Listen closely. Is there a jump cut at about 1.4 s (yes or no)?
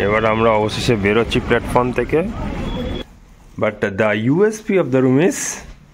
no